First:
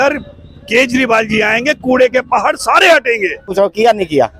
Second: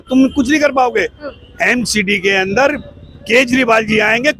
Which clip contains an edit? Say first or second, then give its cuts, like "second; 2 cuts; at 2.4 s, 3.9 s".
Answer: first; 1 cut; at 3.5 s